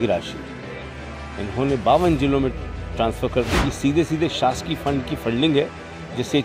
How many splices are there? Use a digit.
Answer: 1